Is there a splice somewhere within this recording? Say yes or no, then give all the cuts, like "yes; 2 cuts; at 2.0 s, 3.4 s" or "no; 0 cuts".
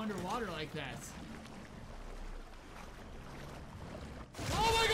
no; 0 cuts